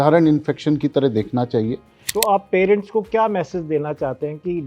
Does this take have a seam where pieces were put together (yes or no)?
yes